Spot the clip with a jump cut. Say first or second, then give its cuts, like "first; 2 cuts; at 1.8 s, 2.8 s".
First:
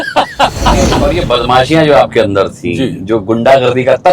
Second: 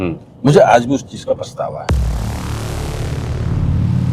first; 1 cut; at 0.9 s